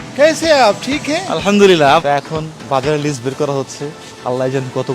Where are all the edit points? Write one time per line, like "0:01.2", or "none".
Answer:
0:02.0